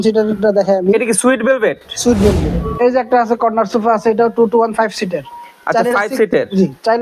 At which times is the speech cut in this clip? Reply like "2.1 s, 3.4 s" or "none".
2.5 s